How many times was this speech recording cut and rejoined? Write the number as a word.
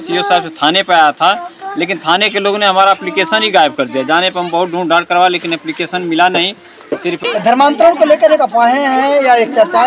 one